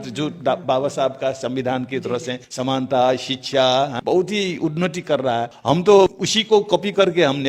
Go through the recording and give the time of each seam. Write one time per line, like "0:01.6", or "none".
0:02.4
0:04.0
0:05.5
0:06.3